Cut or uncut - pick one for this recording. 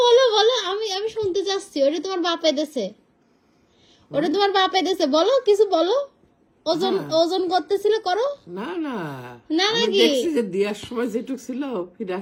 uncut